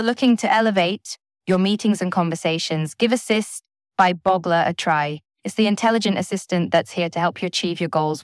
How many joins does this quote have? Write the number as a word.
zero